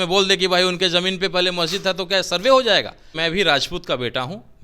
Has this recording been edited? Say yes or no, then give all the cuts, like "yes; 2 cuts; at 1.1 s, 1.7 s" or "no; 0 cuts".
yes; 1 cut; at 3.2 s